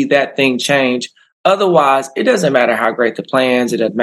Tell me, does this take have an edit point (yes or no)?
no